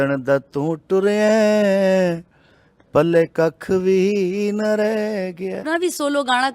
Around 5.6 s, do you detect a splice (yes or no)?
yes